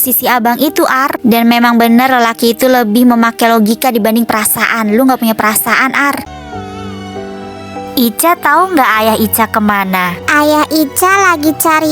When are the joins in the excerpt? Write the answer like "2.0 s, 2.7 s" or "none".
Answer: 6.2 s